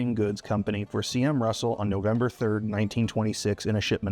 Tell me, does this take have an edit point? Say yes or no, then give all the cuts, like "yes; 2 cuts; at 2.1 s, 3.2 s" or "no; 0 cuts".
no; 0 cuts